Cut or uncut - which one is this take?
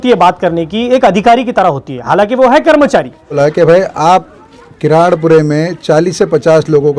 cut